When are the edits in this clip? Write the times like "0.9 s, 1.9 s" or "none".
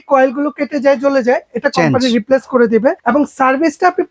3.0 s